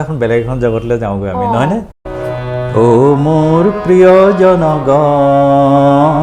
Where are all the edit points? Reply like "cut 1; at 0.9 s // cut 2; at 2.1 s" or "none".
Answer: cut 1; at 2.0 s